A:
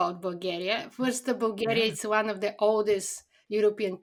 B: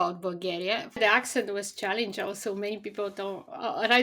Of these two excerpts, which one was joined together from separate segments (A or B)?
B